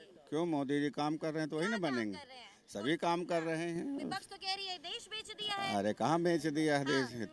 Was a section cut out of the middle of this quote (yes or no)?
no